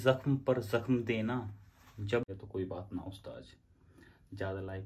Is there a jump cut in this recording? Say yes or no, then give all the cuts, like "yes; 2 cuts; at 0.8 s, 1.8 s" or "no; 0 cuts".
yes; 1 cut; at 2.3 s